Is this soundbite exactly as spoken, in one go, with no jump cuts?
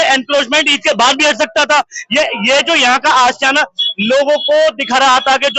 yes; 0 cuts

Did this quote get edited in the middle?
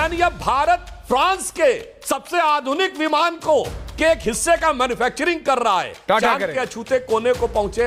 yes; 1 cut; at 0.9 s

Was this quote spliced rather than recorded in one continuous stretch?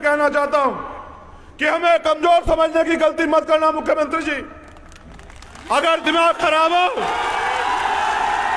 no; 0 cuts

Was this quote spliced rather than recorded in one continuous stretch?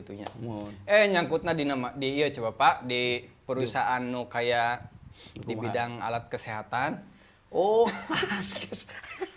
no; 0 cuts

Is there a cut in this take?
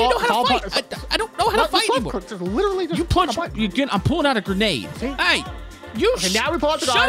yes; 1 cut; at 4.9 s

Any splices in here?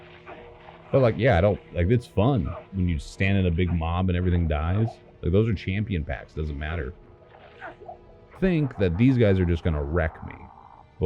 yes; 1 cut; at 8.3 s

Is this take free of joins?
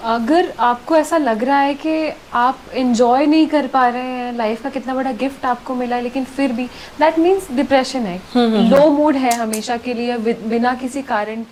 yes; 0 cuts

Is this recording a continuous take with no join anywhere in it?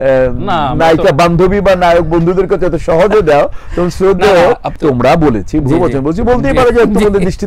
yes; 0 cuts

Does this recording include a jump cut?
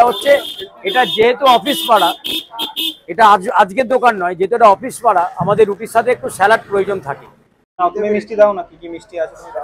yes; 1 cut; at 7.9 s

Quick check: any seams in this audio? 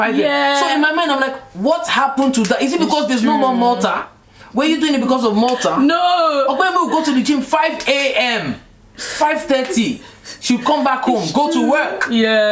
no; 0 cuts

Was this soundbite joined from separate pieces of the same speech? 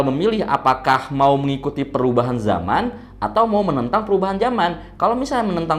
no; 0 cuts

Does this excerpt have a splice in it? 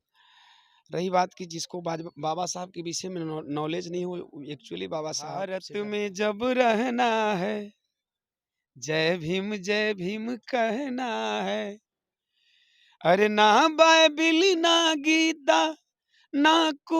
yes; 1 cut; at 5.6 s

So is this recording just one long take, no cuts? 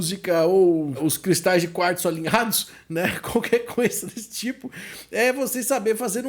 no; 1 cut; at 1.0 s

